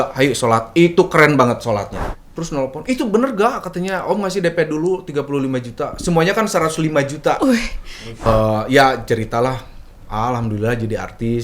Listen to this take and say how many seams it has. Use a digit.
2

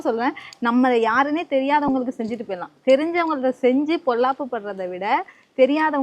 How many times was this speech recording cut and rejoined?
0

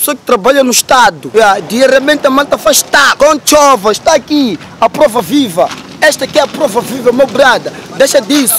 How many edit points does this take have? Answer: 2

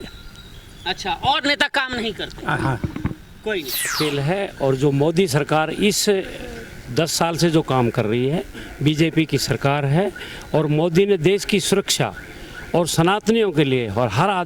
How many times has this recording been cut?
1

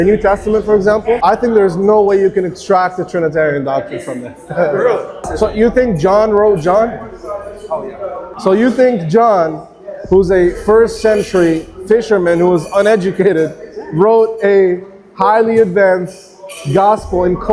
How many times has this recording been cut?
3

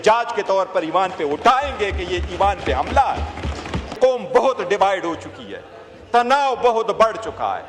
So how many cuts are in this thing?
1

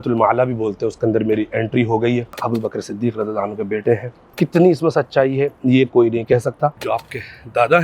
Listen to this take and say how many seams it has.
3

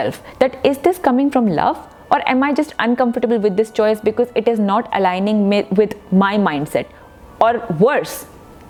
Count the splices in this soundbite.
0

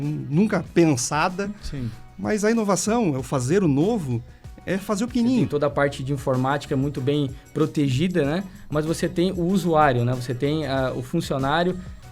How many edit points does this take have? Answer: 1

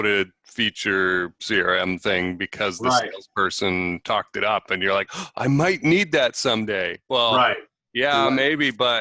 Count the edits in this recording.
0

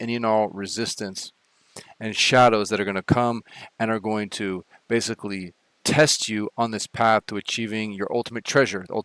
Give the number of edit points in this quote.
0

